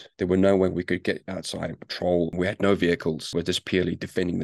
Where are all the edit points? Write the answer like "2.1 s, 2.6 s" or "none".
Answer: 2.3 s, 3.3 s